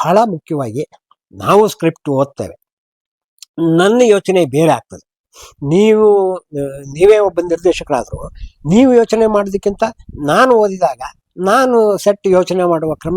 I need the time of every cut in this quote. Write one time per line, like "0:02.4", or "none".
none